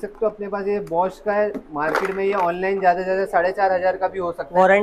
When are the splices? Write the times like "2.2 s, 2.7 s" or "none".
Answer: none